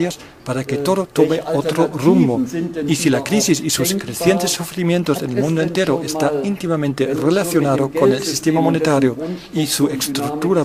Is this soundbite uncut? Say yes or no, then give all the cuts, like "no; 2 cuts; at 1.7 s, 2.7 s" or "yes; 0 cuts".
yes; 0 cuts